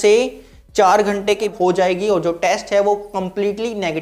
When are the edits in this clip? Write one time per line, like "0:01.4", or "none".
0:01.5

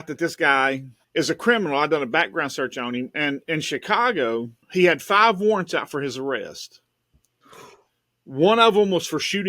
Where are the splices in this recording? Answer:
0:00.9
0:04.6

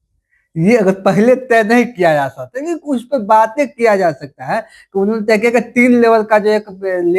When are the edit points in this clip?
none

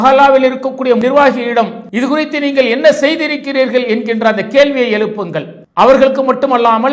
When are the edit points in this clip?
0:01.0
0:01.8

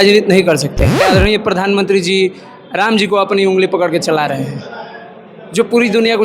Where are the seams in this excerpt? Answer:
0:01.0

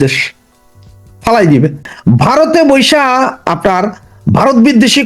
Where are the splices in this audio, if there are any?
0:01.8

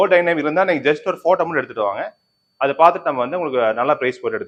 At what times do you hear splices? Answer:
none

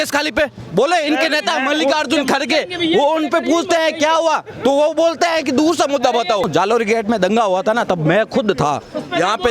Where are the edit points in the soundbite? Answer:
0:06.5

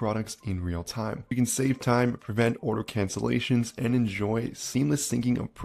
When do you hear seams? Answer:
0:01.2

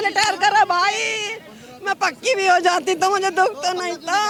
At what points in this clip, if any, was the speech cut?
none

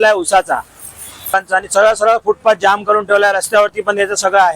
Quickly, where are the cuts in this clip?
0:01.3

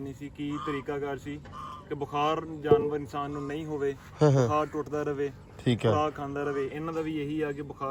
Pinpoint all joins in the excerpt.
none

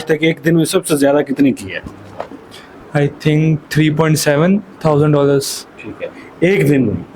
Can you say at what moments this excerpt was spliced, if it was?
none

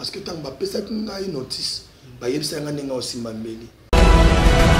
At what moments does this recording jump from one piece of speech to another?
0:03.7

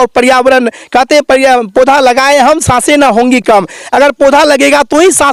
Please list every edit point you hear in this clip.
none

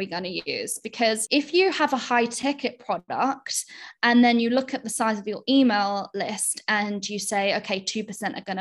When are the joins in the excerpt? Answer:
0:01.2

